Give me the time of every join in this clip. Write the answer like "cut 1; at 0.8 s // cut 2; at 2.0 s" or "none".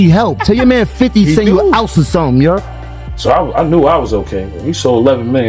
cut 1; at 2.6 s